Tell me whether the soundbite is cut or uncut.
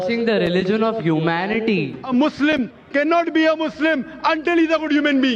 cut